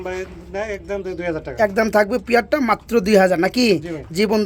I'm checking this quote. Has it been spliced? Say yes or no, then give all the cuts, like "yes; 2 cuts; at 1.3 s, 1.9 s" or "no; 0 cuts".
no; 0 cuts